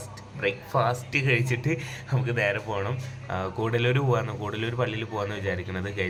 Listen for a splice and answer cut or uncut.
uncut